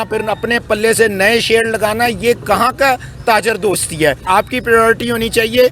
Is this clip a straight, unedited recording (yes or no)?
no